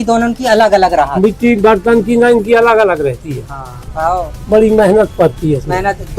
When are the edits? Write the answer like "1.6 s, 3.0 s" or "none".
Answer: 3.9 s